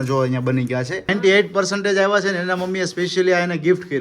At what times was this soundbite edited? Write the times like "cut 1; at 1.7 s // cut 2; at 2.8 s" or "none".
cut 1; at 1.1 s